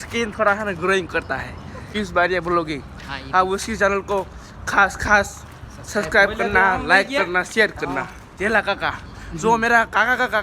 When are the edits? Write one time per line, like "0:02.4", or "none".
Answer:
0:01.8
0:08.2